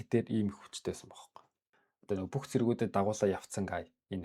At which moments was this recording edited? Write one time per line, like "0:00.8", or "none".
0:01.7

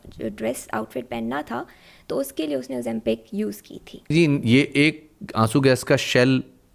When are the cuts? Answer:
0:04.1

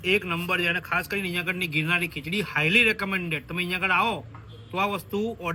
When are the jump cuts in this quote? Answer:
none

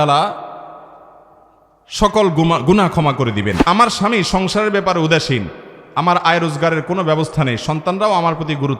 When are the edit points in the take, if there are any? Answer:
0:03.6

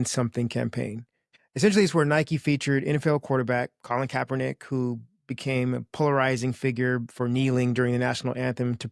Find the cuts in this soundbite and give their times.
0:01.3

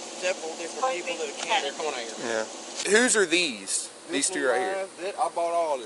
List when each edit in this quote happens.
0:02.8

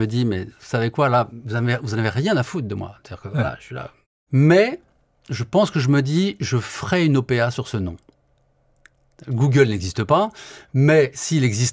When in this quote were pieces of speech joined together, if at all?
0:04.1

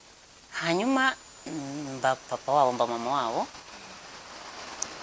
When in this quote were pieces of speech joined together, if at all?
none

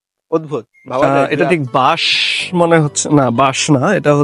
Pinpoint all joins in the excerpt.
0:01.0

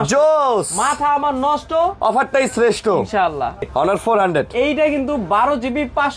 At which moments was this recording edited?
0:03.7

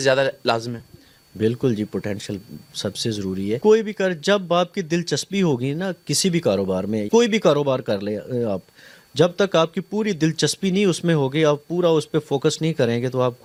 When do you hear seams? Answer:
none

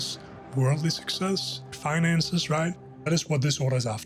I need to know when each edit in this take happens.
0:01.7
0:03.1

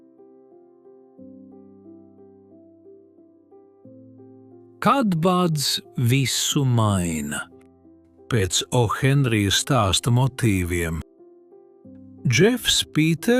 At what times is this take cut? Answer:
0:04.8

